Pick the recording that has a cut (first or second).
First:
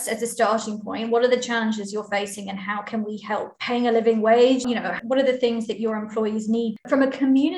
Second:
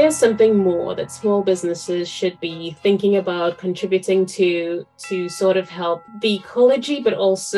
first